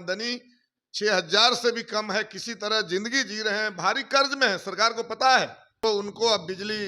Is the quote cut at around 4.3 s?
no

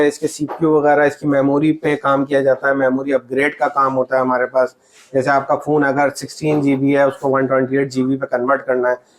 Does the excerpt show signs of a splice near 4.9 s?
no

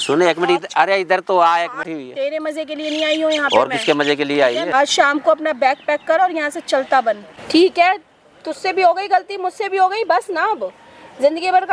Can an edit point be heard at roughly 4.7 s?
yes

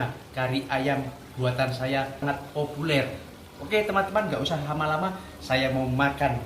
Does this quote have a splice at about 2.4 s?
yes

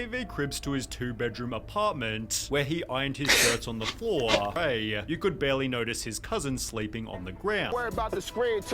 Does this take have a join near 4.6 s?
yes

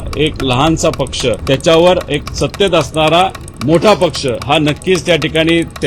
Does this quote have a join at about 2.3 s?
yes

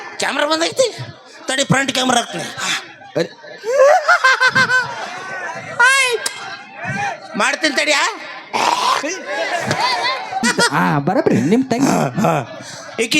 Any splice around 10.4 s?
yes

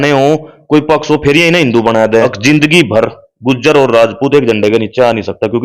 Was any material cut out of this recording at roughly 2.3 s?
yes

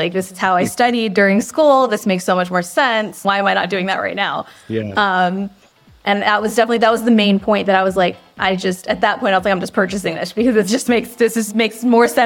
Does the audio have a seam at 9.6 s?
no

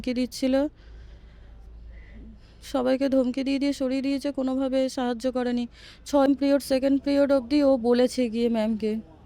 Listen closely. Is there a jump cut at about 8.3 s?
no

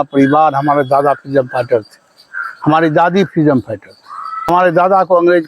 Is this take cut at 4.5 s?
yes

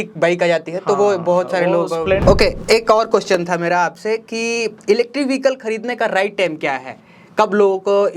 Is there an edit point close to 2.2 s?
yes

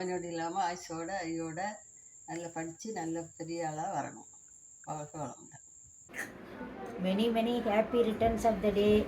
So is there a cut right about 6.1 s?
yes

